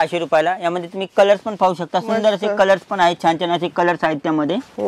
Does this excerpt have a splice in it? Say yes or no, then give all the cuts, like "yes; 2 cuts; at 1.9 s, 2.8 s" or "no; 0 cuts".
no; 0 cuts